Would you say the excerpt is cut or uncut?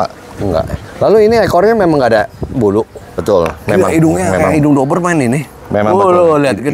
cut